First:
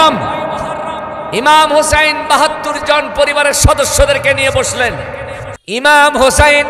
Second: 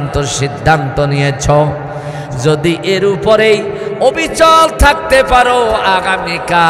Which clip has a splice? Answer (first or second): first